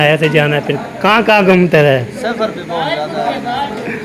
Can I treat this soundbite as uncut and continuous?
yes; 0 cuts

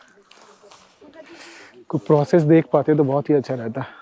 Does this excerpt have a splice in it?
no; 0 cuts

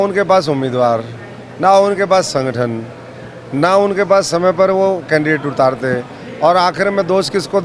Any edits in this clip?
no; 0 cuts

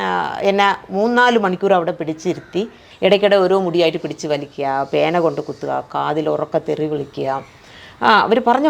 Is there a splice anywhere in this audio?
yes; 1 cut; at 2.8 s

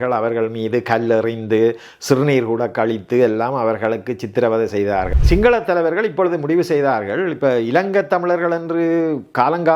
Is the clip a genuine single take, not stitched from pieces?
no; 1 cut; at 5.1 s

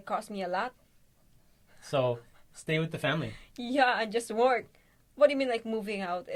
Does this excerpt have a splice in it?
no; 0 cuts

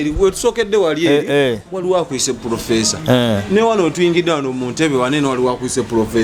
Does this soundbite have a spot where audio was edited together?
no; 0 cuts

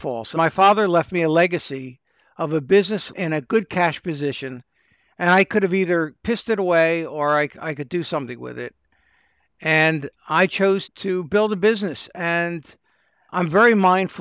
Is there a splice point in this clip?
no; 0 cuts

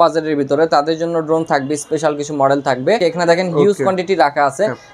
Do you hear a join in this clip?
no; 0 cuts

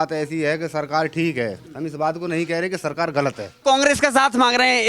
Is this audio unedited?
no; 2 cuts; at 1.7 s, 3.5 s

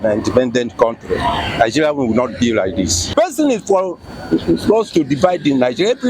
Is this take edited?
yes; 1 cut; at 3.1 s

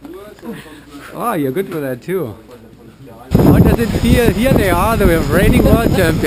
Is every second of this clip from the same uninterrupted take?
no; 1 cut; at 3.2 s

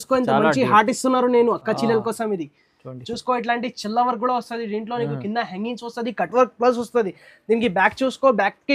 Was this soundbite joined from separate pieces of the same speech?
no; 0 cuts

